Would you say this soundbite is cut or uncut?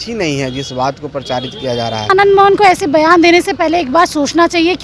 cut